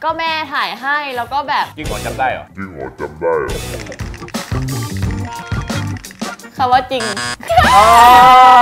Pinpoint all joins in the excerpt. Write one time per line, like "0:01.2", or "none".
0:07.4